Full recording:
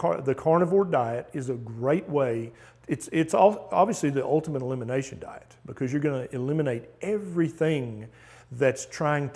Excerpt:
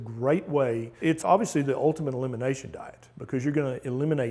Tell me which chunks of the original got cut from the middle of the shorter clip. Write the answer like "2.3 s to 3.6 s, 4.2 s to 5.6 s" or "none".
2.8 s to 3.6 s